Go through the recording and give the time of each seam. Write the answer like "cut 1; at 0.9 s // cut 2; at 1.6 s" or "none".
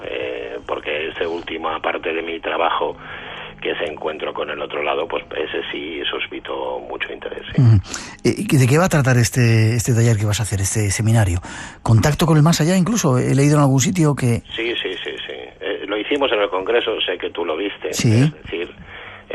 none